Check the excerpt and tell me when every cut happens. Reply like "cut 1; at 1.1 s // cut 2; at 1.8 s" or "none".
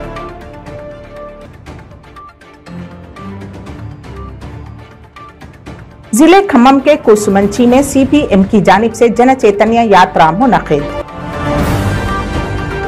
none